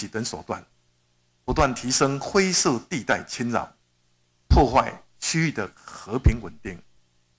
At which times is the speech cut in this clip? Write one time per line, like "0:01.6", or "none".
none